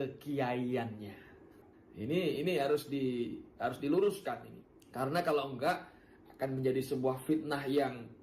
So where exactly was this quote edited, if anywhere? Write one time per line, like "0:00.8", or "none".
0:01.5